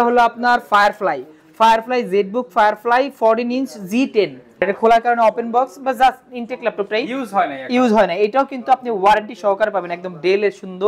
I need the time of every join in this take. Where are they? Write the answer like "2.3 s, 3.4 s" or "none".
4.6 s

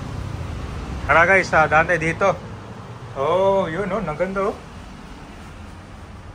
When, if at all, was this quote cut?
1.0 s

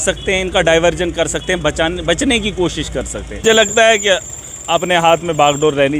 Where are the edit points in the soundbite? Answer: 3.4 s

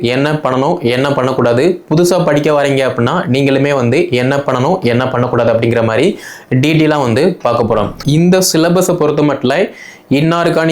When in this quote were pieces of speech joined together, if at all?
8.0 s

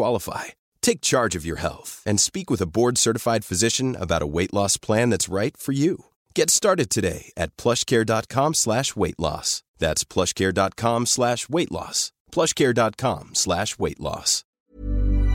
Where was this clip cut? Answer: 14.4 s

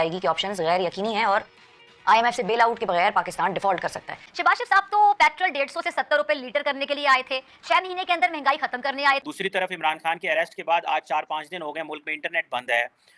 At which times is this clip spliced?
4.2 s, 9.2 s

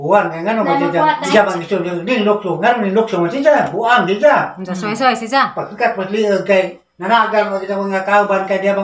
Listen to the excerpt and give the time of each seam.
1.2 s

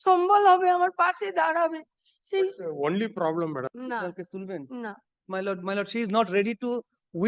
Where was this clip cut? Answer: 3.7 s

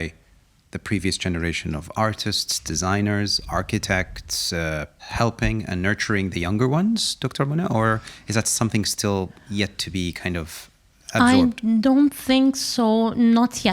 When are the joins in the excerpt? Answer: 5.0 s

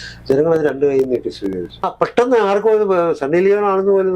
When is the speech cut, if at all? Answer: 1.9 s

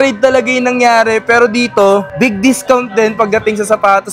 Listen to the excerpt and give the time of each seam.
none

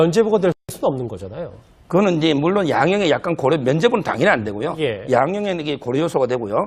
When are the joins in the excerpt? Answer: none

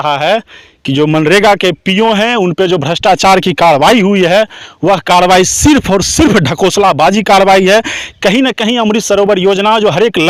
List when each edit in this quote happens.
none

